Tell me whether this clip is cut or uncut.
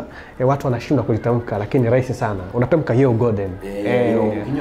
uncut